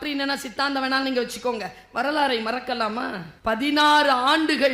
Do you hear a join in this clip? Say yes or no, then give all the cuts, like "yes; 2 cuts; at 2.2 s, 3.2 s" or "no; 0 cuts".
yes; 1 cut; at 3.3 s